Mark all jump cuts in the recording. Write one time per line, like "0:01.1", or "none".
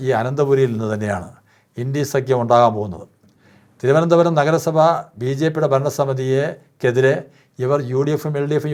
none

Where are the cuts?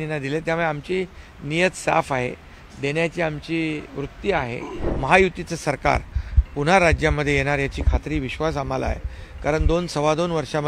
0:04.8

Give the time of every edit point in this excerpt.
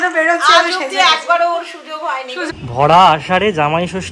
0:02.5

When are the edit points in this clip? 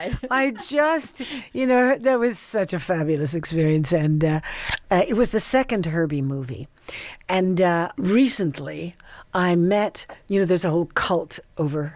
0:07.9

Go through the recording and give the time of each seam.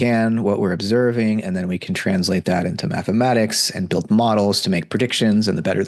none

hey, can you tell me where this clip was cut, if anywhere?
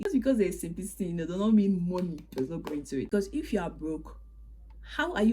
0:03.1

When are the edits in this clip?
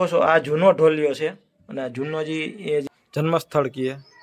0:02.9

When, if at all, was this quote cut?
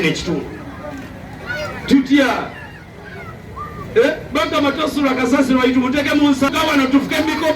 0:06.5

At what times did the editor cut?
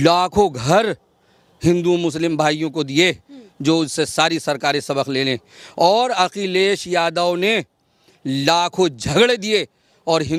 none

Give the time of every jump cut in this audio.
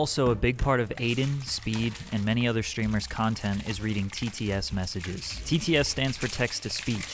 0:00.9

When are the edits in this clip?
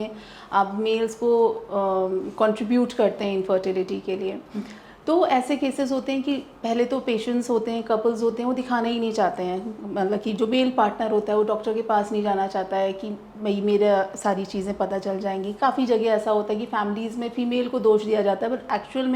none

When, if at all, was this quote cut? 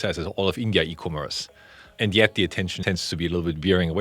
0:02.7

